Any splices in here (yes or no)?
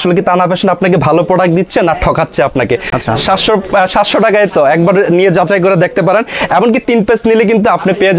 no